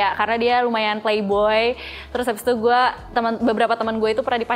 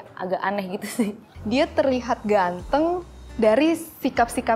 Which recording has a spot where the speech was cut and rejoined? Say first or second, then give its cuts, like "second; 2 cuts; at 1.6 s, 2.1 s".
second; 1 cut; at 1.3 s